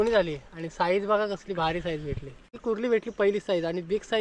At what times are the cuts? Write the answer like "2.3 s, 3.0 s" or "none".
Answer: 2.6 s